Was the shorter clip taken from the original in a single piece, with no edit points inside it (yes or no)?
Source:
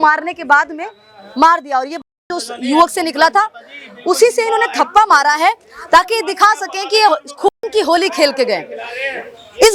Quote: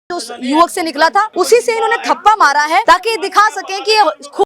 no